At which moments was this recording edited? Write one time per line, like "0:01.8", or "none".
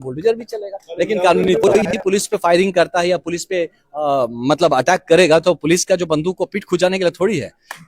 0:01.9